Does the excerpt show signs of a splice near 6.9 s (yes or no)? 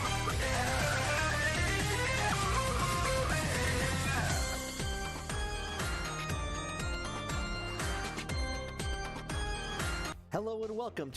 no